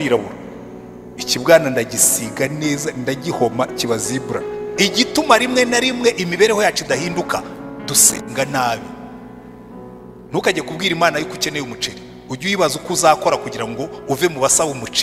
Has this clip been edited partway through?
yes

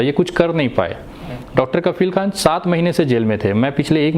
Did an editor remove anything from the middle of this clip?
no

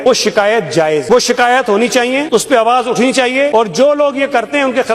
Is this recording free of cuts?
yes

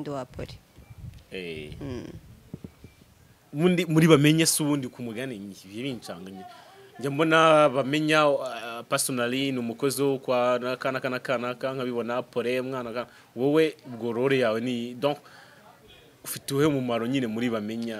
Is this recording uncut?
yes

